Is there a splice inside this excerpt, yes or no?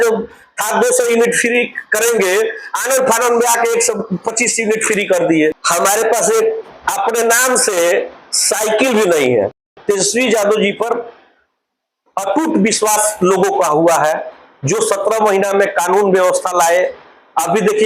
yes